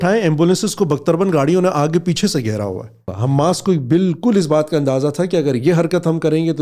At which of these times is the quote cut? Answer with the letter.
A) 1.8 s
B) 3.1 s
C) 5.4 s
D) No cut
B